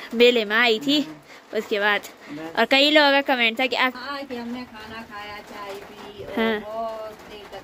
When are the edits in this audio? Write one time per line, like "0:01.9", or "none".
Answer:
0:04.0